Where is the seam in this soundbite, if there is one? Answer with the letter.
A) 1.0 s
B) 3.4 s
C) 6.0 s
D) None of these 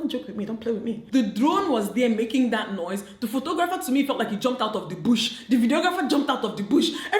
A